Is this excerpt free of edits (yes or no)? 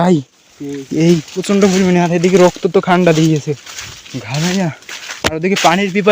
no